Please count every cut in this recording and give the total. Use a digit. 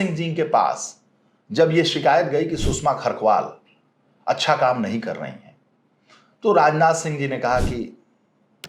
0